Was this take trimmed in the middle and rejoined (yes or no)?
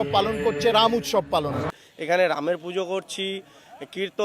yes